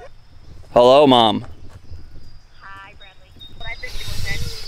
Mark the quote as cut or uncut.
uncut